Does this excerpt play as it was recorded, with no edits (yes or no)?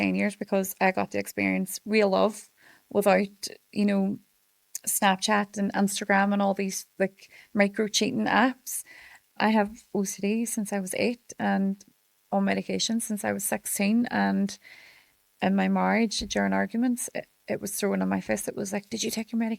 no